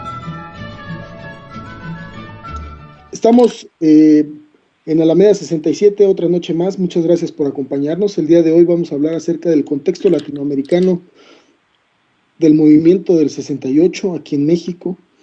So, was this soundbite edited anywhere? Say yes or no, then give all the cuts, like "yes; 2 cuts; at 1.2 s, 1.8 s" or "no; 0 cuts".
no; 0 cuts